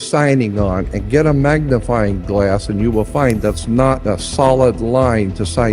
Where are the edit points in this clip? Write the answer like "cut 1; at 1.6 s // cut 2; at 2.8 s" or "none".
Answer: cut 1; at 4.0 s